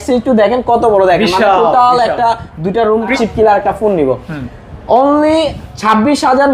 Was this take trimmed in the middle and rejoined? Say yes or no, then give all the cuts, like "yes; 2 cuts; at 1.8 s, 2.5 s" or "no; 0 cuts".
yes; 1 cut; at 3.1 s